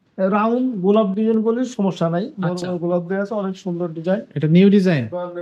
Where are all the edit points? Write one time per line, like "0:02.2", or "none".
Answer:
none